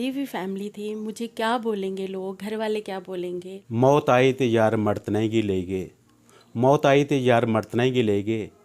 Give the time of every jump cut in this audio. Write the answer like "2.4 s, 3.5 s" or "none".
3.5 s